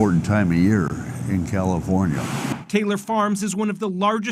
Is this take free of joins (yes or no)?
no